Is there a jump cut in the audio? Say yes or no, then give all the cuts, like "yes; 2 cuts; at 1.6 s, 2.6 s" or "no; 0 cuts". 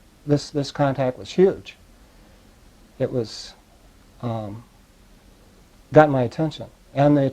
no; 0 cuts